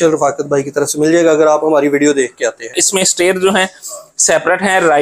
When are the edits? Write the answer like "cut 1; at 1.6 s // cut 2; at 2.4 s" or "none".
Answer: cut 1; at 2.8 s